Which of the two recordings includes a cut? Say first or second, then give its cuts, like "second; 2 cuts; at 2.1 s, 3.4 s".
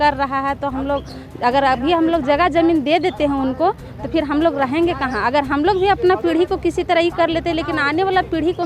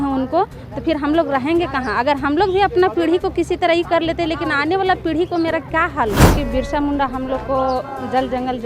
second; 1 cut; at 6.3 s